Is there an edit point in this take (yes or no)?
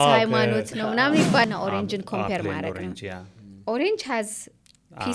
yes